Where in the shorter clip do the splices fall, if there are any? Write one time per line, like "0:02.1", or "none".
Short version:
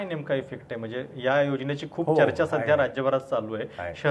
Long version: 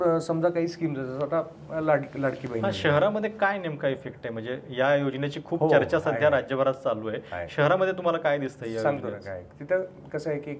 none